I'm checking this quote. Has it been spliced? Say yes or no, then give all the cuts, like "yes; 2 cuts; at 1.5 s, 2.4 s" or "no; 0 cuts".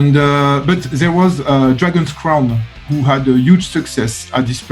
no; 0 cuts